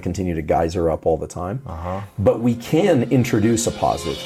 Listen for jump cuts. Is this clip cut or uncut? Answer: uncut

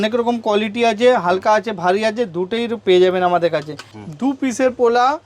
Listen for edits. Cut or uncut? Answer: cut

